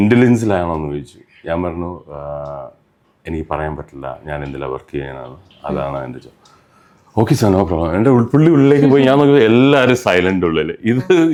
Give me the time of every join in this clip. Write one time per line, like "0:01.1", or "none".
none